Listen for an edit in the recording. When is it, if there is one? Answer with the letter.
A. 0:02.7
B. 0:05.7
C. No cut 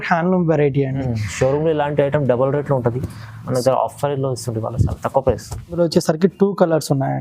B